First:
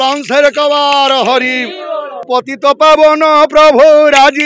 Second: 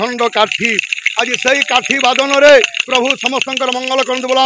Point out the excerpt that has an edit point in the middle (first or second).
first